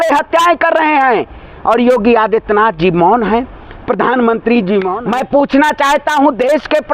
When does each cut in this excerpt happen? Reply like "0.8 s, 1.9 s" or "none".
4.9 s